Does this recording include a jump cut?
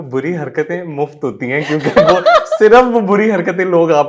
no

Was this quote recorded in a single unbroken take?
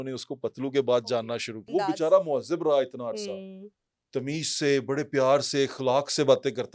no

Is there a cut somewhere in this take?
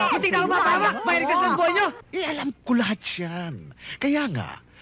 no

